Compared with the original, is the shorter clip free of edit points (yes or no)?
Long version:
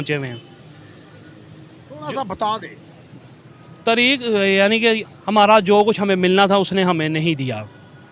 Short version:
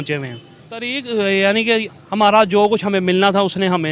no